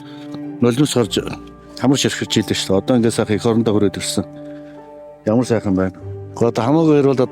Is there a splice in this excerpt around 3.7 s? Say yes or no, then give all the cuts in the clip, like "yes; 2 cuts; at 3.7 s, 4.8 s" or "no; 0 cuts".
no; 1 cut; at 6.2 s